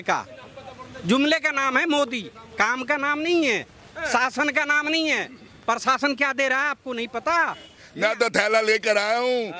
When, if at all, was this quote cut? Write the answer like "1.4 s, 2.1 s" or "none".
7.8 s